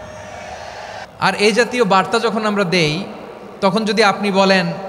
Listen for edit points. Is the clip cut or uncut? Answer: cut